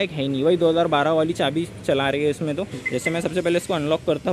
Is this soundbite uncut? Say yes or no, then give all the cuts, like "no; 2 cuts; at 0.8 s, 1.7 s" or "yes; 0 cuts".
no; 1 cut; at 2.7 s